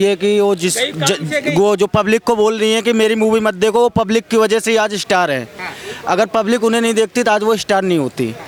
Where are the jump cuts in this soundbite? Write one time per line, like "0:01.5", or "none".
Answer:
none